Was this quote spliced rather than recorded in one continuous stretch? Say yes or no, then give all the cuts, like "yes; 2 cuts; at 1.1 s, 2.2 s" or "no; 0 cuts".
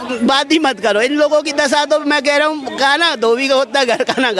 no; 0 cuts